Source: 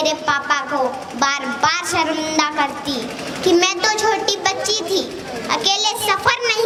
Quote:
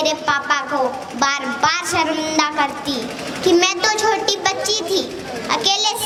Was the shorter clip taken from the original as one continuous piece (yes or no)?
yes